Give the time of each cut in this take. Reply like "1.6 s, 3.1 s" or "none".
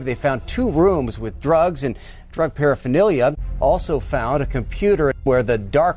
3.5 s, 5.2 s